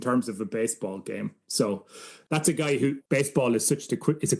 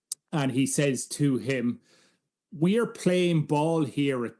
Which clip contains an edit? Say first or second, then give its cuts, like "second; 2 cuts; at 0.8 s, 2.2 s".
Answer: first; 2 cuts; at 2.1 s, 3.0 s